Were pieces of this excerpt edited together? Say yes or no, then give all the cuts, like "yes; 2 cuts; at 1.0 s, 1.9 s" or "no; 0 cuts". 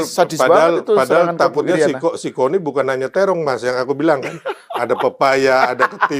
no; 0 cuts